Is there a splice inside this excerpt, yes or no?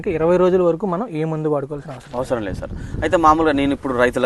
no